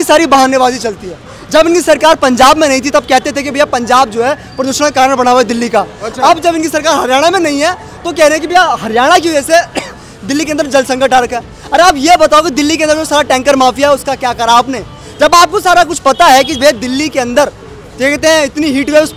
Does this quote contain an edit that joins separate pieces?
no; 0 cuts

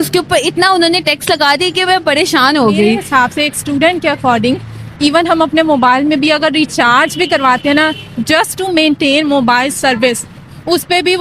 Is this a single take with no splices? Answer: no; 1 cut; at 3.0 s

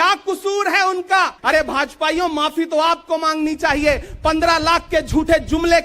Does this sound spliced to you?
yes; 1 cut; at 1.4 s

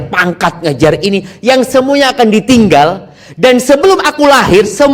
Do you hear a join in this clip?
no; 0 cuts

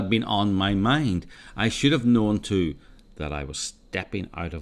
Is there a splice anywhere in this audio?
yes; 1 cut; at 1.3 s

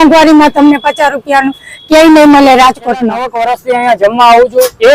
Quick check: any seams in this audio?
yes; 1 cut; at 3.3 s

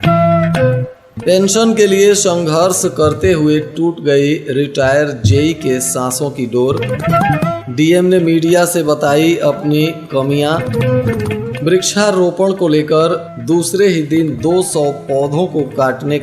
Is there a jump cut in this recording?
yes; 1 cut; at 0.9 s

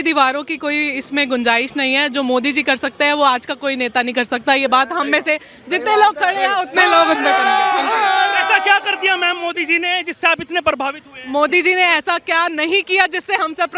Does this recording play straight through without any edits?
yes; 0 cuts

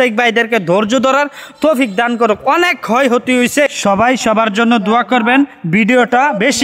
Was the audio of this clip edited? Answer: no; 0 cuts

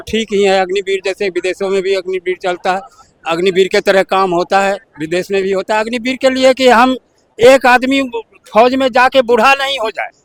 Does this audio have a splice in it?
no; 0 cuts

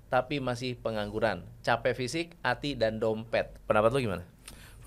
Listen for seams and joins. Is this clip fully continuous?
yes; 0 cuts

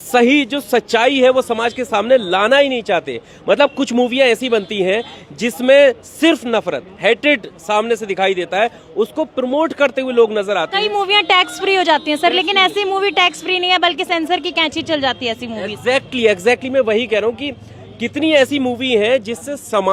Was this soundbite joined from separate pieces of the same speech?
no; 0 cuts

